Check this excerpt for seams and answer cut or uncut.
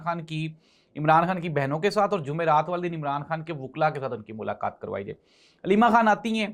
uncut